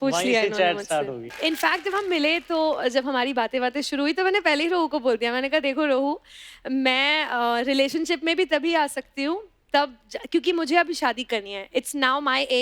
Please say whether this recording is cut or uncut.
cut